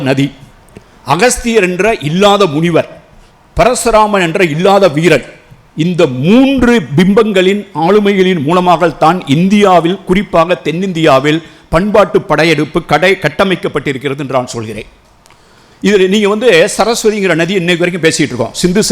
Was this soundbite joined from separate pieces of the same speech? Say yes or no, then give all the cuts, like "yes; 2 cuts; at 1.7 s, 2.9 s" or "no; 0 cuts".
no; 0 cuts